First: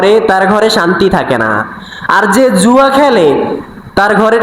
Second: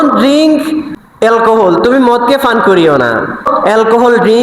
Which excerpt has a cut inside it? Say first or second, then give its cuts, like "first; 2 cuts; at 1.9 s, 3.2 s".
second; 2 cuts; at 1.0 s, 3.5 s